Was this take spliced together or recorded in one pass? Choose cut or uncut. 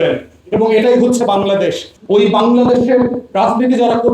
cut